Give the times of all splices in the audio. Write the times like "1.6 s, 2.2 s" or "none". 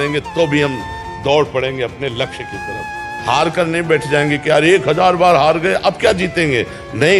none